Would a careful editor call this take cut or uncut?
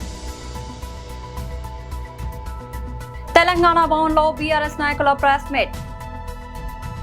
cut